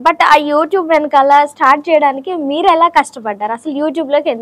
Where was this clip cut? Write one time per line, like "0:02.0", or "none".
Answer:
none